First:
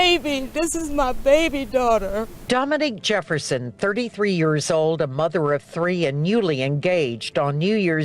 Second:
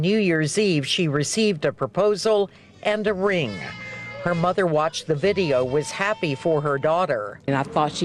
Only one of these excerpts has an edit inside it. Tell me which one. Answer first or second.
first